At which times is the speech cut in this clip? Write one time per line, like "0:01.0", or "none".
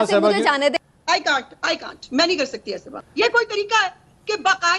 0:00.8
0:02.9